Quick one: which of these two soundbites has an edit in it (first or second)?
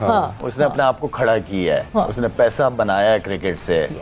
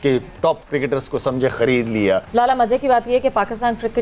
second